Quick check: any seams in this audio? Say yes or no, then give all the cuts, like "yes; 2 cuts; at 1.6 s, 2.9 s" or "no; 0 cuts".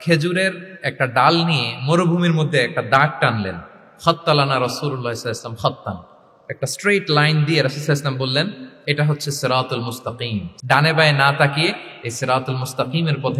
yes; 1 cut; at 10.5 s